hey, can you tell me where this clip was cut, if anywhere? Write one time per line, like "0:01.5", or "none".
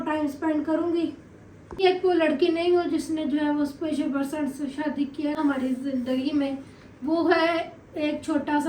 0:01.8
0:05.4